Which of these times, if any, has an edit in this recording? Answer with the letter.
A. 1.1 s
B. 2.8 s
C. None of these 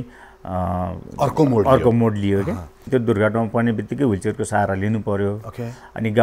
B